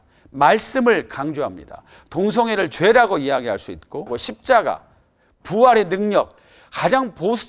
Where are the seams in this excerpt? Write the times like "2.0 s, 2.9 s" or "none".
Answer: 4.3 s